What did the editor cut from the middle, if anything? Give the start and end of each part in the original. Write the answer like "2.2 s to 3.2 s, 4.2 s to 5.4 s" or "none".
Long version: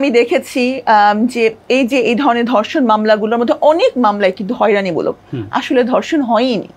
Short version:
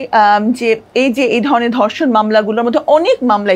none